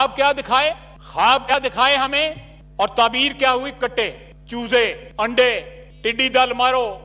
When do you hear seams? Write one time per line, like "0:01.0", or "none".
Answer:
0:01.5